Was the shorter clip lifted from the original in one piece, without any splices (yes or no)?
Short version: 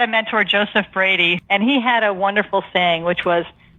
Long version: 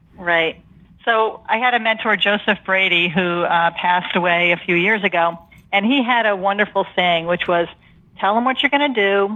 no